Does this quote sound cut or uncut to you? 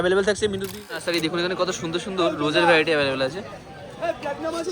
cut